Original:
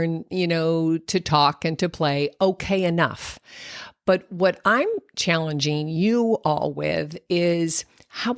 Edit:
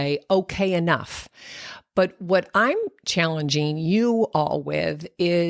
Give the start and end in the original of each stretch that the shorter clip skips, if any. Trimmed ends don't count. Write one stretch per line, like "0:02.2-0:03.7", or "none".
none